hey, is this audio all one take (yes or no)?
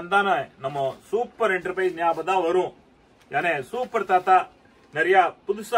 yes